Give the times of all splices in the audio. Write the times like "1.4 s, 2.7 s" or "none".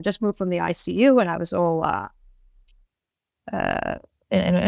none